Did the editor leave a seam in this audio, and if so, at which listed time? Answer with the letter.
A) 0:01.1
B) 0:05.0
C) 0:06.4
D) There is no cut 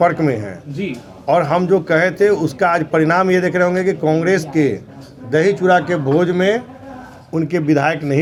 D